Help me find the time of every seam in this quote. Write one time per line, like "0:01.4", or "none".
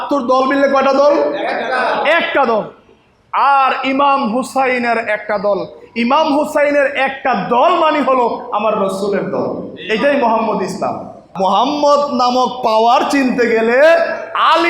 0:11.2